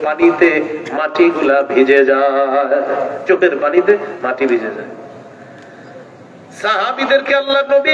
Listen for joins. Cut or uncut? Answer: uncut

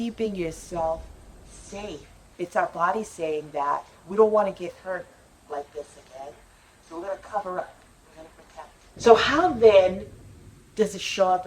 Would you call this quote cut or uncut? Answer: cut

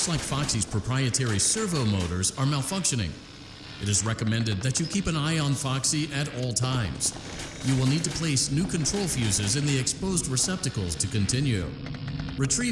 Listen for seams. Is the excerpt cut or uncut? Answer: uncut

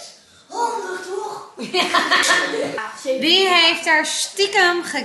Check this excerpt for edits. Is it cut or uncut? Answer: cut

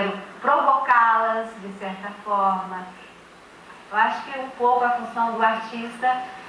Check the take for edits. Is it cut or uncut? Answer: cut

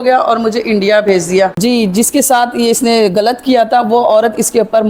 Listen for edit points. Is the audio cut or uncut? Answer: cut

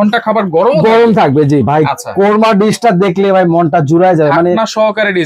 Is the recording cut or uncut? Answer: uncut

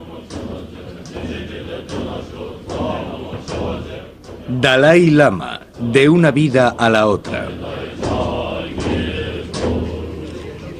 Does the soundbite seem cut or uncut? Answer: cut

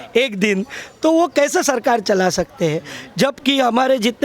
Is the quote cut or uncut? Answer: uncut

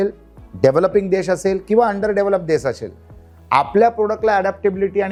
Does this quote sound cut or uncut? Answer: uncut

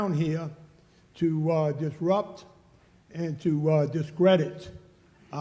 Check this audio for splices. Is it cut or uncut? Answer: uncut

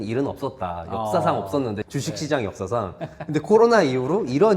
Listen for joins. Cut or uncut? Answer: cut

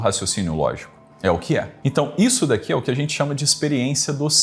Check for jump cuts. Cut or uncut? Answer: cut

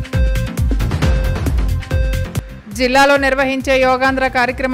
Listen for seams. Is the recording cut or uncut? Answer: cut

